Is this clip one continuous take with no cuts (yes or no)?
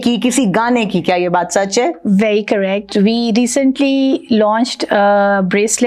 yes